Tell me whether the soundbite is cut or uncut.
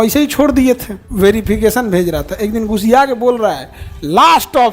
cut